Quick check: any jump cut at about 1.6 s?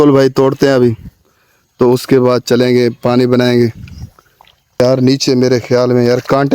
no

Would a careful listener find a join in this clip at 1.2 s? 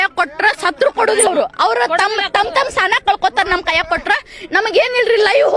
yes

